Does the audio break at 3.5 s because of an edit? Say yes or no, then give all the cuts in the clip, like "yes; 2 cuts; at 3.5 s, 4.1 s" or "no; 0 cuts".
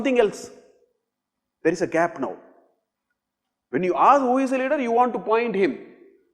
no; 0 cuts